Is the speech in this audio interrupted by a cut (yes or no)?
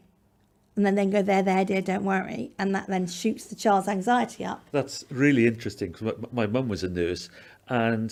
no